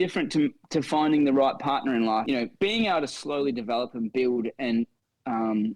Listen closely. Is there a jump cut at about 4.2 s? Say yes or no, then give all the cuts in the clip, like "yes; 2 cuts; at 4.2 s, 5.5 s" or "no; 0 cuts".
no; 1 cut; at 2.2 s